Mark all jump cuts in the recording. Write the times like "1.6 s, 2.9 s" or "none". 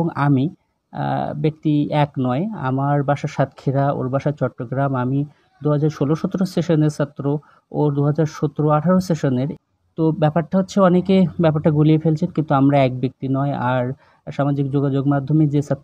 9.5 s